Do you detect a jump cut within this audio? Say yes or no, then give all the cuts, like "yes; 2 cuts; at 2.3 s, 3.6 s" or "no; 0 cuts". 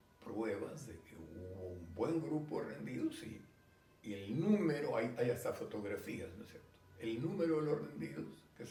no; 0 cuts